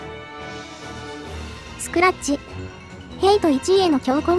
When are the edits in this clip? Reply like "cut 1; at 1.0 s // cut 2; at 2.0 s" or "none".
cut 1; at 1.9 s